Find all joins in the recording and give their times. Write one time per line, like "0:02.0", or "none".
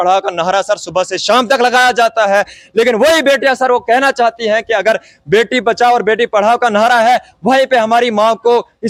none